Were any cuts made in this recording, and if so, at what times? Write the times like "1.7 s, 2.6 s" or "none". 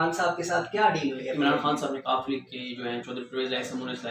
1.3 s